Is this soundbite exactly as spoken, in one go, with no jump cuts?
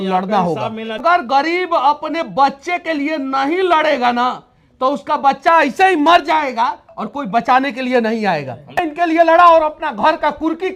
no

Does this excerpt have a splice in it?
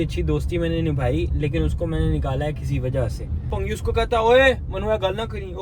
yes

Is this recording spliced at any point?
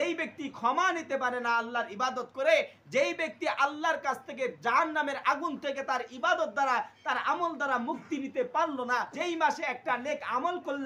yes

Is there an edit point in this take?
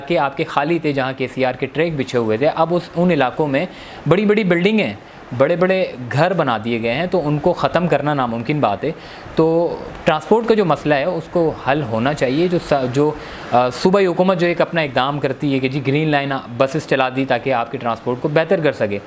no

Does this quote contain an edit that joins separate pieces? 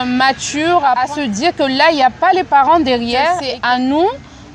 yes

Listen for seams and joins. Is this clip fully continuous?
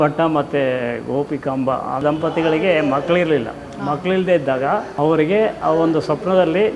no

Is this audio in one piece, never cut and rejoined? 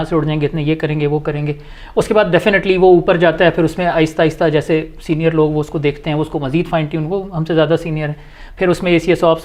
yes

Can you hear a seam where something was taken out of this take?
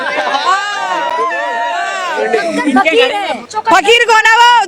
yes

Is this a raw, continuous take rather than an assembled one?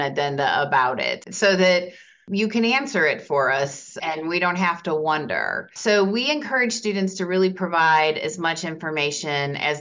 no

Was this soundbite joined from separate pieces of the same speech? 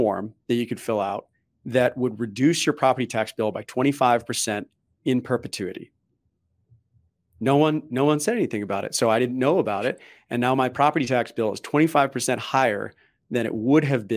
no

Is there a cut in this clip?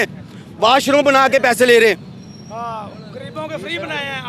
no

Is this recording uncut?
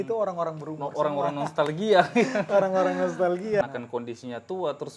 no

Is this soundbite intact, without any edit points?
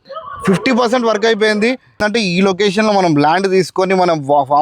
no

